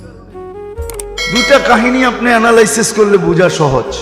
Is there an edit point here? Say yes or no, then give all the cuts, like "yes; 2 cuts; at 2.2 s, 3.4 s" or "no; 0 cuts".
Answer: yes; 1 cut; at 1.2 s